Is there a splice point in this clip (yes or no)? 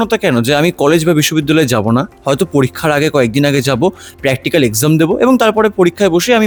no